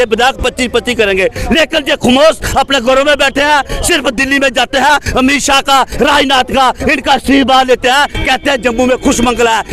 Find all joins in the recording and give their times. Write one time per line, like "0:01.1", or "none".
none